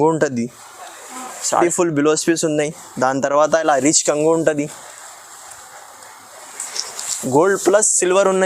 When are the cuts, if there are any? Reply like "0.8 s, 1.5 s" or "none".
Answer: 1.6 s